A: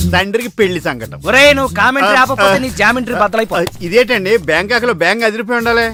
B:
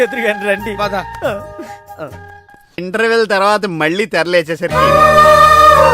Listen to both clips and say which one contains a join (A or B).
B